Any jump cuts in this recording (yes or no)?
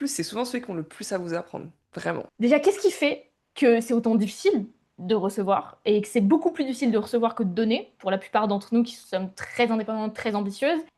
yes